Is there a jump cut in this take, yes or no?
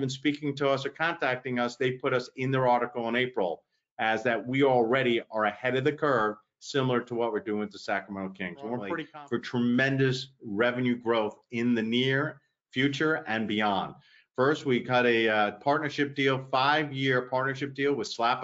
yes